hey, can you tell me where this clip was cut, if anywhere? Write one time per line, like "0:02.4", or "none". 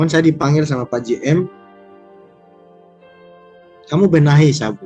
none